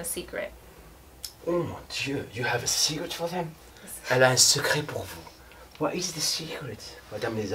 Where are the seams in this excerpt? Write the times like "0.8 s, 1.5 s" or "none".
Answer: none